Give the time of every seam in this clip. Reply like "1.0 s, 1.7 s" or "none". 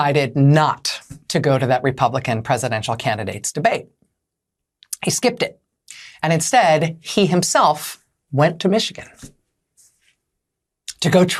none